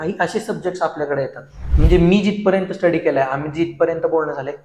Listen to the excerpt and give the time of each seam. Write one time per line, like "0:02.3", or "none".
0:01.6